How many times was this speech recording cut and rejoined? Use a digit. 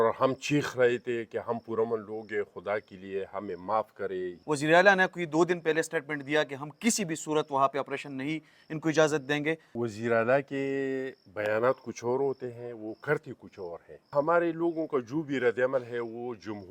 3